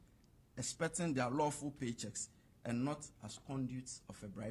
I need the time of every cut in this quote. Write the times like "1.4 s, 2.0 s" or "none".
none